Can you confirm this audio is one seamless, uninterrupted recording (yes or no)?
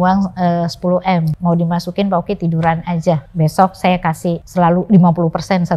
no